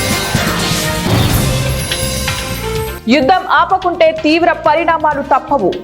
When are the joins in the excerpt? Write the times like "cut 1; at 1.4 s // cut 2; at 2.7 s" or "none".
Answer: cut 1; at 1.9 s // cut 2; at 2.6 s